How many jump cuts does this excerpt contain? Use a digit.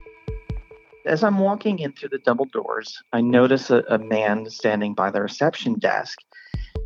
1